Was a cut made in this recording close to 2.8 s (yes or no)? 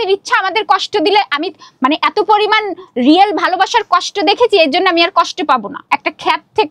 no